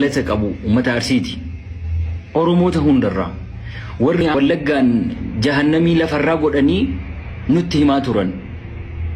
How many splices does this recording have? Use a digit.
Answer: 1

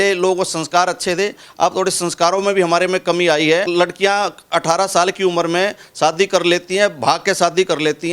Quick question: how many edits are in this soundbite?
1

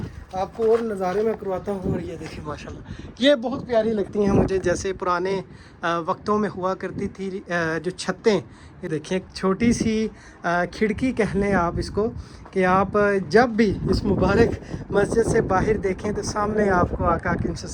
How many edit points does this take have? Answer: 1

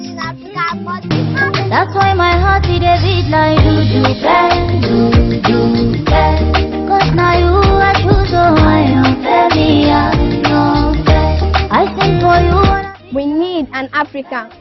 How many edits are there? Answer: 1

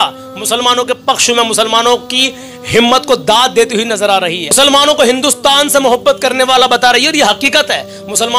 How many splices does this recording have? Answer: 0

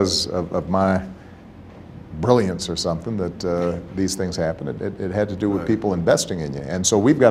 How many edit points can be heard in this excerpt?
0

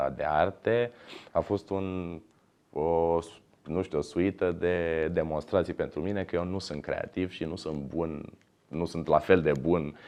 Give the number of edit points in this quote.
0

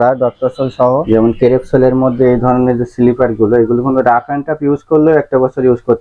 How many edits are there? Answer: 1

